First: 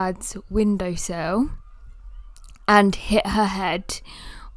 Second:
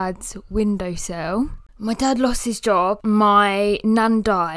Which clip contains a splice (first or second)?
second